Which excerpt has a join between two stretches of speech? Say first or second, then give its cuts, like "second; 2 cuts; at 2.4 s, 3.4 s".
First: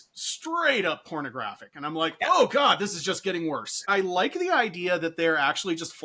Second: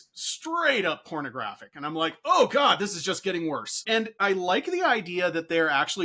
first; 1 cut; at 3.8 s